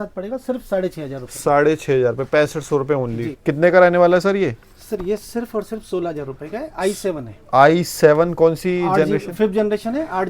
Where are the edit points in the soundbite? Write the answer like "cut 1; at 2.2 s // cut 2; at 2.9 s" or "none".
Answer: cut 1; at 3.3 s